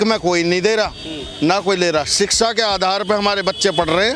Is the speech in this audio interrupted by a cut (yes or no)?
no